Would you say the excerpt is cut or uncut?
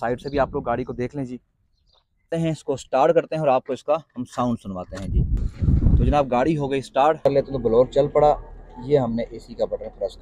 cut